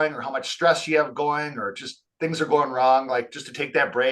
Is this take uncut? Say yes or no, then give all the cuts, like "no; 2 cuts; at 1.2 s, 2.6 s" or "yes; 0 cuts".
yes; 0 cuts